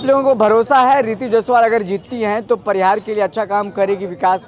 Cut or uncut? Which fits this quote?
uncut